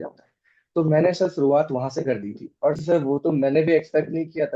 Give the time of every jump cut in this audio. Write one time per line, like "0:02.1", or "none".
0:02.8